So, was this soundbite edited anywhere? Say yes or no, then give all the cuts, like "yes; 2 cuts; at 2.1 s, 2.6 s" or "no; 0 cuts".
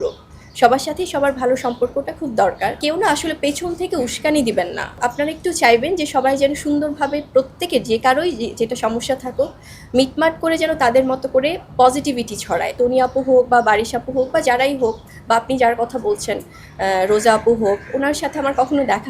yes; 3 cuts; at 2.8 s, 5.0 s, 12.7 s